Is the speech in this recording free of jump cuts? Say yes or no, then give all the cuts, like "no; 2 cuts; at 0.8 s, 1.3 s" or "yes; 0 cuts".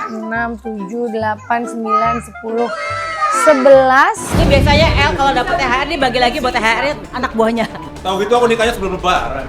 no; 2 cuts; at 4.3 s, 7.9 s